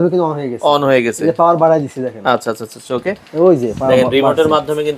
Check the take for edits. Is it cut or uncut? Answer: uncut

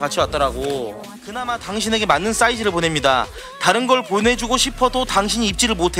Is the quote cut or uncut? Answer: cut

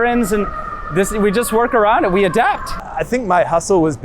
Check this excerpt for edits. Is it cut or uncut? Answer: cut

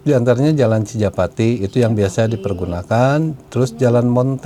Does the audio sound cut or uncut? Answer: uncut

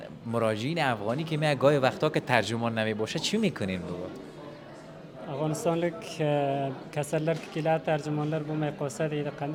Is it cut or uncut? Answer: uncut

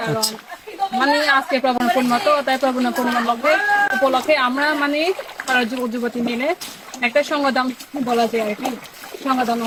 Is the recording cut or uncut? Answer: uncut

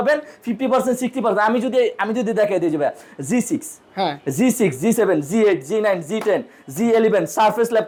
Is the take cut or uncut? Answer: uncut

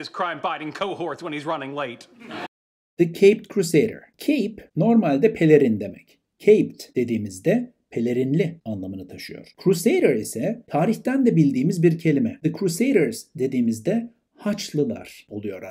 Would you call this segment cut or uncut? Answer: uncut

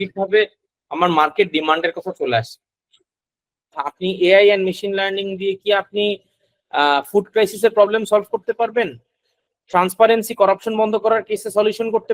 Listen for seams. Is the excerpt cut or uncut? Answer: cut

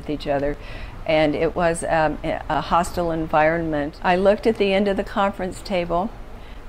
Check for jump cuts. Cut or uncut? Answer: cut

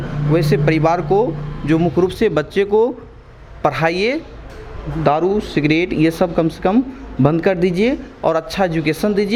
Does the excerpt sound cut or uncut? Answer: uncut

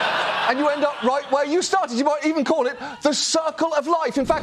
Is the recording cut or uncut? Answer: uncut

